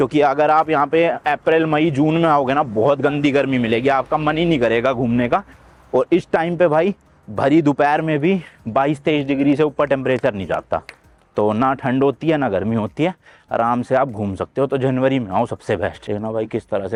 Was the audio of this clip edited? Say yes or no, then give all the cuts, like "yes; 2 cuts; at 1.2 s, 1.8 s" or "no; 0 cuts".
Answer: no; 0 cuts